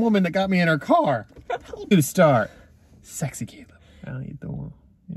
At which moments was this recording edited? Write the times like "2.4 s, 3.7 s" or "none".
1.7 s